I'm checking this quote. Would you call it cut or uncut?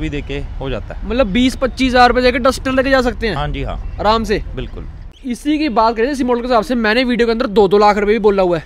cut